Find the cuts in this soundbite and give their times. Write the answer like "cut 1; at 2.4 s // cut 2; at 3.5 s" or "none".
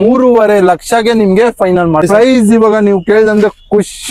cut 1; at 2.1 s